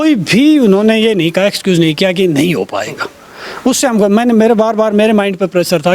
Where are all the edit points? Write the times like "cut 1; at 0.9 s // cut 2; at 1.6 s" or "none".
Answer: none

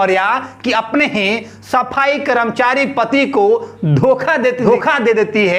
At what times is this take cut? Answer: cut 1; at 4.7 s

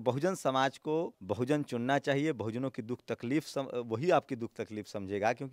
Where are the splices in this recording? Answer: cut 1; at 1.2 s

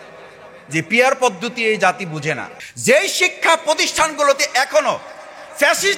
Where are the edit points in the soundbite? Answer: cut 1; at 2.5 s

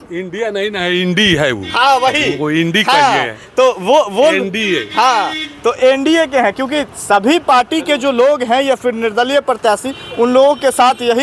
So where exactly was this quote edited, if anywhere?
none

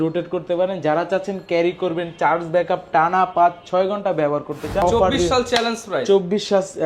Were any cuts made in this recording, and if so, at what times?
cut 1; at 4.8 s

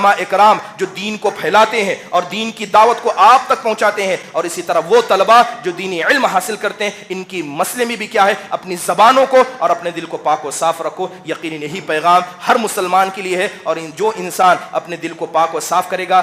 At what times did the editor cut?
none

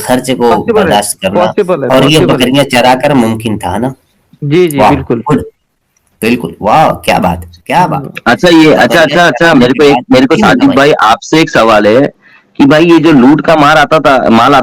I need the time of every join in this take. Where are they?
none

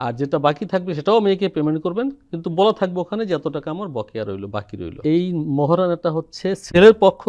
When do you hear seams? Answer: cut 1; at 4.8 s

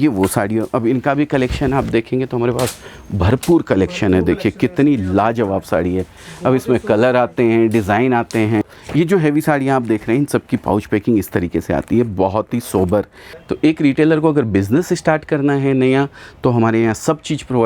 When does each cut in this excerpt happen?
cut 1; at 8.6 s // cut 2; at 13.4 s

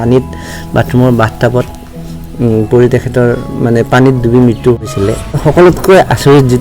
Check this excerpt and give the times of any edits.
cut 1; at 5.4 s

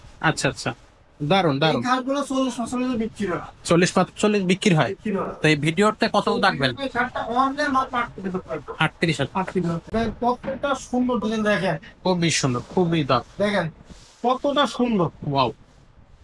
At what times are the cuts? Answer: cut 1; at 9.9 s

